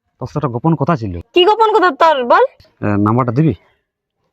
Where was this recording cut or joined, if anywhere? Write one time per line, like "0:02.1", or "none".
0:01.2
0:02.7